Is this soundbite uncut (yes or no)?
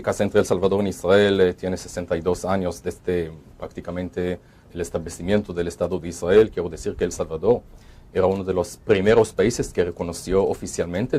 no